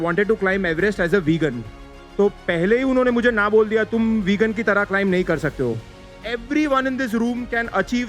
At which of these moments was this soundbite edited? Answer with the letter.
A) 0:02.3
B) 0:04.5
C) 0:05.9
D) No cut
C